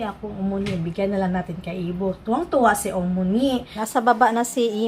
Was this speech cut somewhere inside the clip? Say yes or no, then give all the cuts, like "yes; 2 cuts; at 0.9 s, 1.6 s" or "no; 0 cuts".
yes; 1 cut; at 3.8 s